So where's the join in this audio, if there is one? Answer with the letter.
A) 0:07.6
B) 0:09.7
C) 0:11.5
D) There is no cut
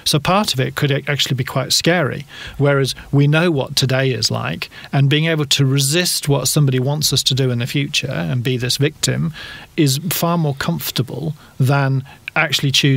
B